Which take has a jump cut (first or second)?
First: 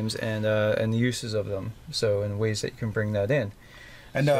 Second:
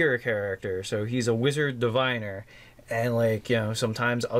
first